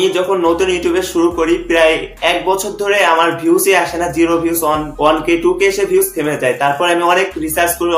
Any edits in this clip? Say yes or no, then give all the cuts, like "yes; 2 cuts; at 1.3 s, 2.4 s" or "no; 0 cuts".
yes; 1 cut; at 4.9 s